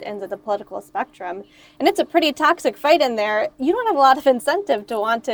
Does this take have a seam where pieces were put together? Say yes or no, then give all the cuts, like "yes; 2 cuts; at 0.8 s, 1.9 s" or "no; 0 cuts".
no; 0 cuts